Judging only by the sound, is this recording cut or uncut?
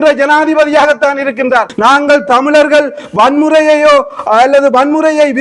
cut